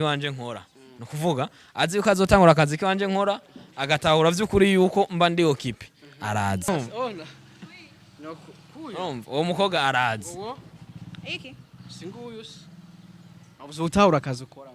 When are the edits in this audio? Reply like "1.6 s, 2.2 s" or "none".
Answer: 6.7 s